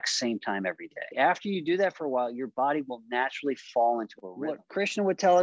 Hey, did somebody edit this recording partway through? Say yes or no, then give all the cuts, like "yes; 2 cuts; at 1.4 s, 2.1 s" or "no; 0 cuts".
yes; 2 cuts; at 1.1 s, 4.3 s